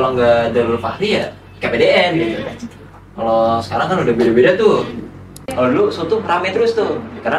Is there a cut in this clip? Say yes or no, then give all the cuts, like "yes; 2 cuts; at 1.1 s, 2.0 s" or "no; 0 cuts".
yes; 1 cut; at 5.4 s